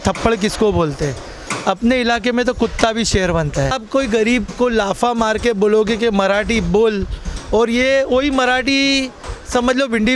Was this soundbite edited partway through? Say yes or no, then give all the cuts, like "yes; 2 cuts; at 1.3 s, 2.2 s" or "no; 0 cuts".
no; 0 cuts